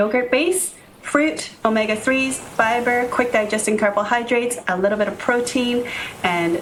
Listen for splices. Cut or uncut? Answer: uncut